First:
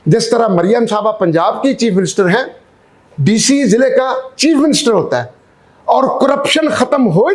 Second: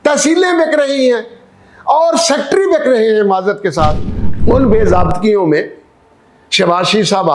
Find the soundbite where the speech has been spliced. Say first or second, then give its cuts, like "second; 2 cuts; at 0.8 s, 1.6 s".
second; 1 cut; at 4.1 s